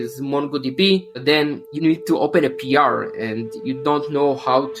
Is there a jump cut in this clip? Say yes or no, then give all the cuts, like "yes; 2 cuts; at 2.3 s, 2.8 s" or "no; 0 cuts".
no; 0 cuts